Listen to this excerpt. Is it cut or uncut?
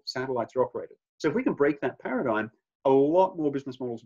uncut